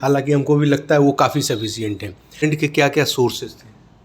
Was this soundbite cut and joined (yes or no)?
yes